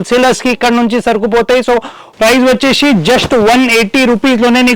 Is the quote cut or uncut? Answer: cut